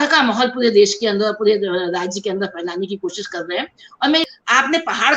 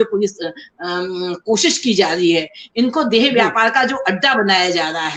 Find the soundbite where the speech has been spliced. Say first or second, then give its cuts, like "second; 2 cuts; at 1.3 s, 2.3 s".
first; 1 cut; at 4.2 s